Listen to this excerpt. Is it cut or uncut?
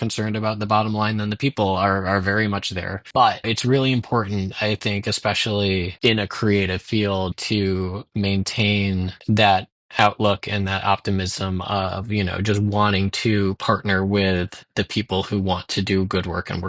uncut